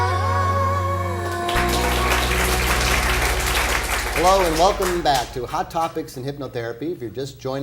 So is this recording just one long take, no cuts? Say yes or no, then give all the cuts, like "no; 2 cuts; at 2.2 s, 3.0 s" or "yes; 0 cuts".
yes; 0 cuts